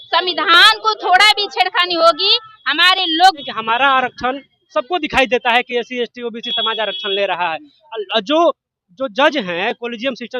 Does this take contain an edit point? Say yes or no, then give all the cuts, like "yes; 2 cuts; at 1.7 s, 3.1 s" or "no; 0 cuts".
yes; 1 cut; at 3.4 s